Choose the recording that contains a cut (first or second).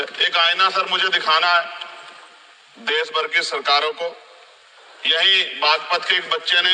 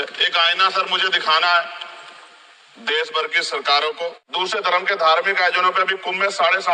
second